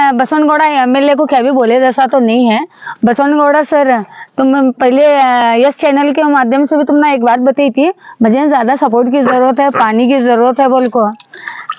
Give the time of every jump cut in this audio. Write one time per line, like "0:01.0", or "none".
none